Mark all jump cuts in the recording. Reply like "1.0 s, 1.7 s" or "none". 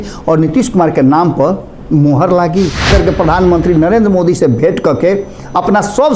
2.9 s